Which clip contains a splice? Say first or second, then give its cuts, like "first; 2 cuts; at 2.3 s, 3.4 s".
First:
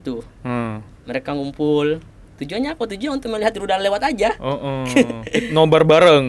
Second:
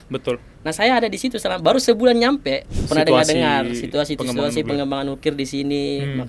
second; 1 cut; at 2.7 s